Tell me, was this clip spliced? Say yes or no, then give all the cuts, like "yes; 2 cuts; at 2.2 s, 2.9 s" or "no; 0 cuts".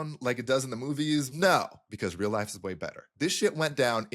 yes; 3 cuts; at 1.3 s, 1.8 s, 3.1 s